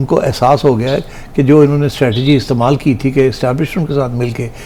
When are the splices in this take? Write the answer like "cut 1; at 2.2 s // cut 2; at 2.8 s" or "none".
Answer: none